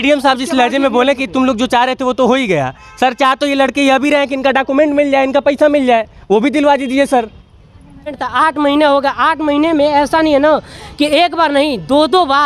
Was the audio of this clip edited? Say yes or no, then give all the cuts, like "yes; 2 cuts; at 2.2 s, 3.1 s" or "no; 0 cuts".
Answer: yes; 1 cut; at 8.2 s